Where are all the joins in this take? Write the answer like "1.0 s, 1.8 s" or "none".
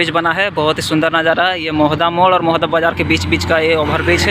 none